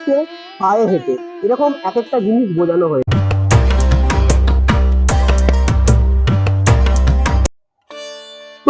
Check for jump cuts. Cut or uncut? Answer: uncut